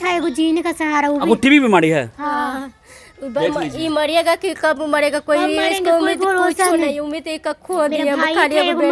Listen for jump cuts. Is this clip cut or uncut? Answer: uncut